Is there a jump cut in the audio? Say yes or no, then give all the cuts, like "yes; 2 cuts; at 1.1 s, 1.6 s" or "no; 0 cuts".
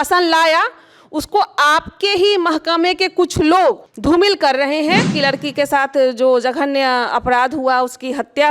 yes; 2 cuts; at 3.9 s, 5.1 s